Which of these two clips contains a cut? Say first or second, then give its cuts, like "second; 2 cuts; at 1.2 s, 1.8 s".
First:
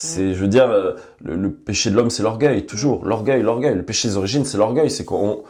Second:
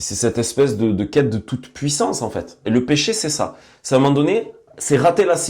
second; 1 cut; at 2.5 s